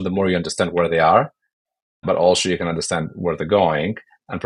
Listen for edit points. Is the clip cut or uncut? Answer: uncut